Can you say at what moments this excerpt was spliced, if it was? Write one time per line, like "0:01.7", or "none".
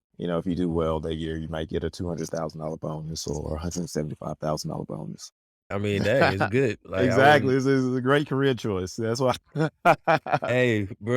0:05.7